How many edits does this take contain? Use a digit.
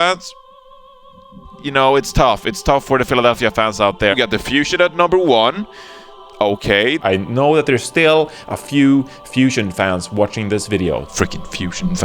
2